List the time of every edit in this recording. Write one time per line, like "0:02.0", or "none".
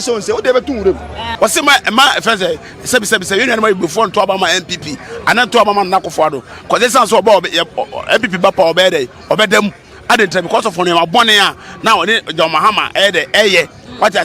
0:01.2